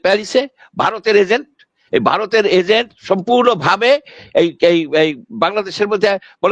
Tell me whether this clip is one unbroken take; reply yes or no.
yes